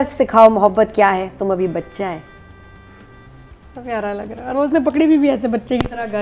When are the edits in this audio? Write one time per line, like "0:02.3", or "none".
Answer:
none